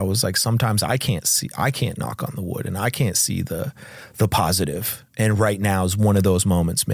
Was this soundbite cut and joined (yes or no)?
no